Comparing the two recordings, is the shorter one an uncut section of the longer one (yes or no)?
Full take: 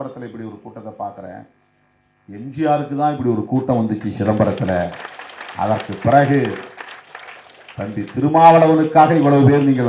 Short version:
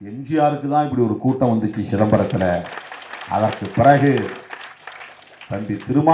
yes